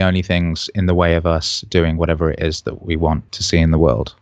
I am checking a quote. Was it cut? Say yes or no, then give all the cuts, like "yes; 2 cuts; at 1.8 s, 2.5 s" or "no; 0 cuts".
yes; 1 cut; at 3.3 s